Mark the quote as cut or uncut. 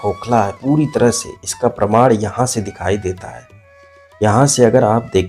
uncut